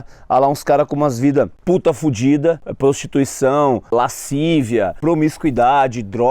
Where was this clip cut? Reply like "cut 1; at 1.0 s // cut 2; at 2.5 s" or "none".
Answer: cut 1; at 1.6 s // cut 2; at 2.7 s // cut 3; at 3.9 s // cut 4; at 5.0 s